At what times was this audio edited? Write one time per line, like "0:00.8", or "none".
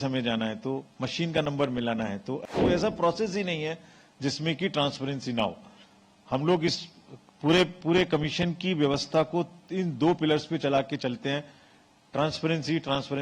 0:02.4